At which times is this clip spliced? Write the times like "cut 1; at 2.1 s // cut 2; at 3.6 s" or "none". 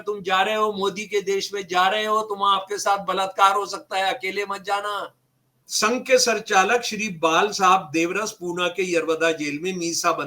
cut 1; at 5.6 s